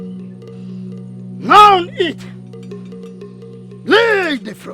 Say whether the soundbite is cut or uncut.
cut